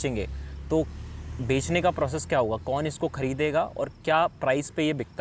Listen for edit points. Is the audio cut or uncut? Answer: uncut